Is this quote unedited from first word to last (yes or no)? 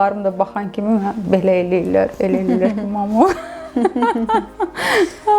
yes